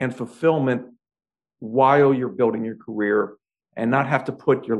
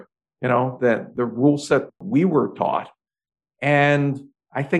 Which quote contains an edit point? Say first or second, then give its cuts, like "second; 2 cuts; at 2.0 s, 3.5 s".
second; 1 cut; at 2.0 s